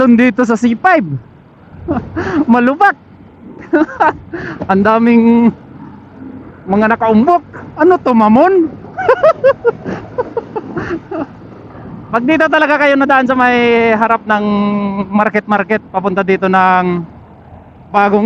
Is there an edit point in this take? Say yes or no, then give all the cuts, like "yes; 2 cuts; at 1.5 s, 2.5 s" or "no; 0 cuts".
no; 0 cuts